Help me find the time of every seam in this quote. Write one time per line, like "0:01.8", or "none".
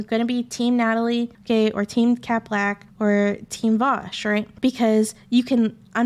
0:01.4
0:02.8
0:04.5